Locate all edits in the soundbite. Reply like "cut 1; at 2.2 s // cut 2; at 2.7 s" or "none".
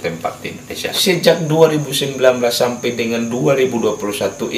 cut 1; at 0.9 s